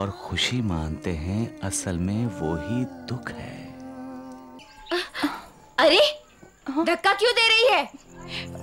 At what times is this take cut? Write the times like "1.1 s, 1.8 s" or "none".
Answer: 4.6 s